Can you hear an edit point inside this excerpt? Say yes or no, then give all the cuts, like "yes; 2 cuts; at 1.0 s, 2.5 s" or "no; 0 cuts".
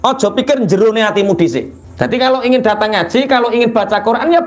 yes; 1 cut; at 1.8 s